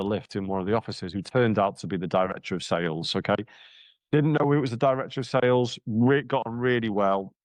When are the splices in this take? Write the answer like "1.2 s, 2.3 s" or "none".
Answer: none